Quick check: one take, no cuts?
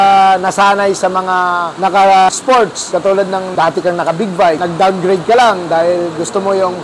yes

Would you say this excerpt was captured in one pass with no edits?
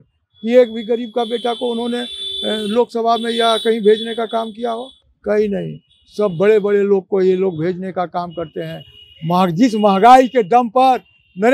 yes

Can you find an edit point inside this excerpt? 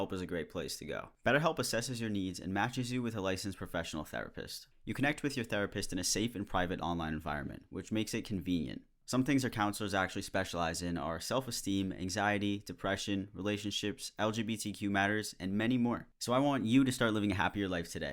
yes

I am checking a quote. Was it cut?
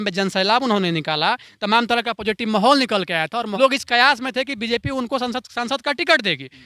yes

